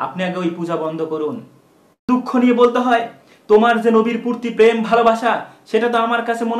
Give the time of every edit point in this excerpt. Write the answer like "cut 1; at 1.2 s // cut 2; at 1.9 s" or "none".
cut 1; at 2.1 s